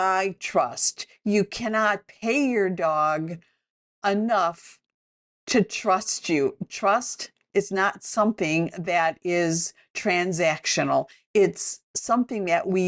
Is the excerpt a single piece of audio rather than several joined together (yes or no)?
yes